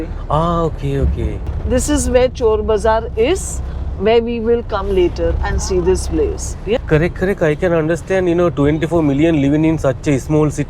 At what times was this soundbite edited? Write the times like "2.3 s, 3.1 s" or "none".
1.5 s, 6.8 s